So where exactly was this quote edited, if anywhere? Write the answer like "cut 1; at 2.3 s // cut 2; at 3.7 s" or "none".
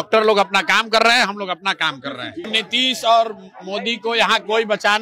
cut 1; at 2.5 s